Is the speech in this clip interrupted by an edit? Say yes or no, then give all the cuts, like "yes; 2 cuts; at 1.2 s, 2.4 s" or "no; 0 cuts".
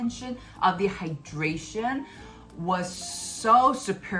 no; 0 cuts